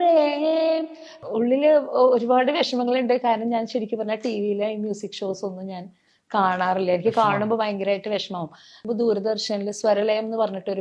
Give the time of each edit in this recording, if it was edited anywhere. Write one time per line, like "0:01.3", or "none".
0:01.2
0:08.8